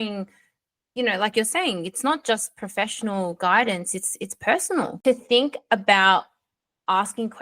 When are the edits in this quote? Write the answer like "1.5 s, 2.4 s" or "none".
4.9 s